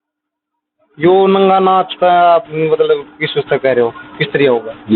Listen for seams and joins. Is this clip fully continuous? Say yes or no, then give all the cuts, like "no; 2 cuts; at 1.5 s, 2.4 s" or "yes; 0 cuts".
yes; 0 cuts